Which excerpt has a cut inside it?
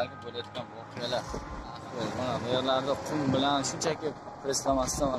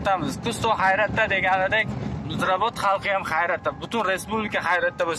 first; 1 cut; at 1.8 s

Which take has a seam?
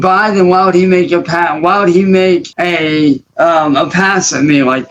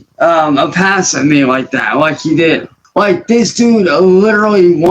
second; 1 cut; at 2.7 s

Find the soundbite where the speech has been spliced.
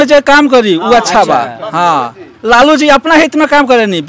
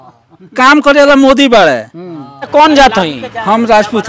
second; 1 cut; at 2.5 s

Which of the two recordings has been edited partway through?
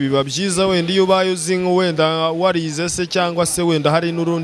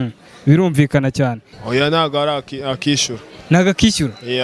second; 1 cut; at 1.4 s

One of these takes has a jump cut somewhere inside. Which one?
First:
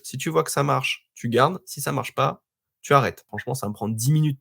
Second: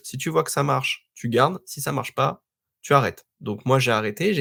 first; 1 cut; at 3.3 s

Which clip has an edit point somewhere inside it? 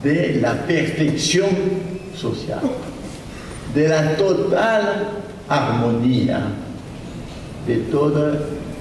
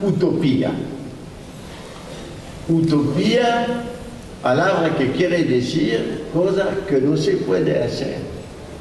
first; 1 cut; at 1.0 s

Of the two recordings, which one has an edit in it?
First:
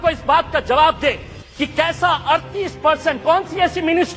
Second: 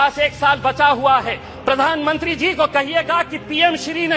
second; 1 cut; at 1.5 s

